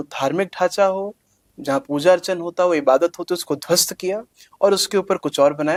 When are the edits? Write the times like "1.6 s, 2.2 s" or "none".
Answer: none